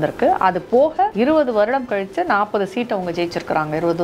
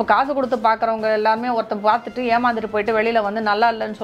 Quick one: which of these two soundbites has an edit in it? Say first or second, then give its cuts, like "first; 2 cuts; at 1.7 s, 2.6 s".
first; 1 cut; at 1.1 s